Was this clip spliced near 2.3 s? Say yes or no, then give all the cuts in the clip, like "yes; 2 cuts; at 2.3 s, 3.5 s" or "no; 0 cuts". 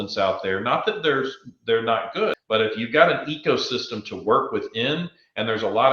yes; 1 cut; at 2.3 s